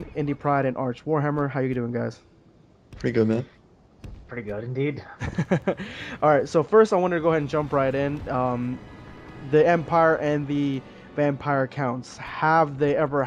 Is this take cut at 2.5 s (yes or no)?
no